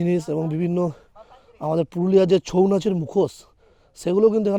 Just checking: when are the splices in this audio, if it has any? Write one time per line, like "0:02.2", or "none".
none